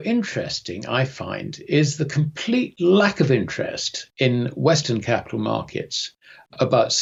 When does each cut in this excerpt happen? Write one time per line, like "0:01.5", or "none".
none